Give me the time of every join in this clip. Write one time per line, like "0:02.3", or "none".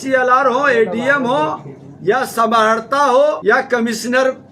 0:03.4